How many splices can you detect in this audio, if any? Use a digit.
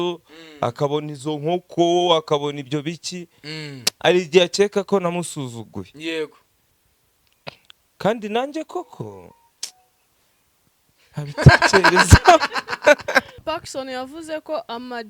1